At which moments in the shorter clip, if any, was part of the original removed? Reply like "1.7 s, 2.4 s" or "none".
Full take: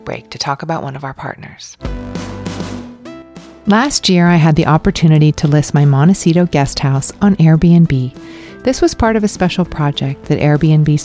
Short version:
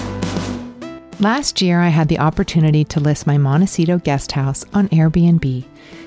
1.0 s